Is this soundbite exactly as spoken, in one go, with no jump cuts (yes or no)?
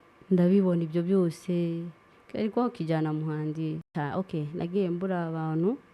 no